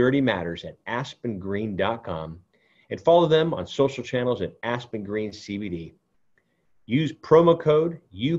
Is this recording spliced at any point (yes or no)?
no